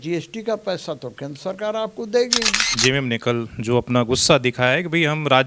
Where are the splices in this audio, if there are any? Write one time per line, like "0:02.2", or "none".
0:02.7